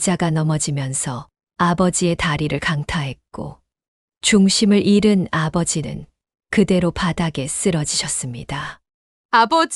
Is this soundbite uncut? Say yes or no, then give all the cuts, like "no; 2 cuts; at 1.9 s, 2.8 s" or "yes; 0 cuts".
yes; 0 cuts